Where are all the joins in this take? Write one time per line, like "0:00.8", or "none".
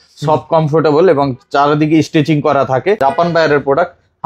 0:03.0